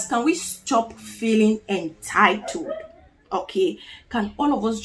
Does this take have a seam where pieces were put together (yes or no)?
no